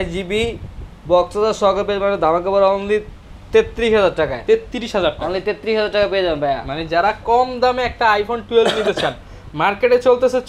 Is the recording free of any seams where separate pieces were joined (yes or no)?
yes